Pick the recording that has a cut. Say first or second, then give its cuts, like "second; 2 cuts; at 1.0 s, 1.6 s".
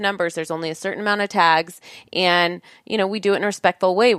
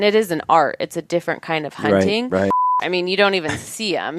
second; 1 cut; at 2.6 s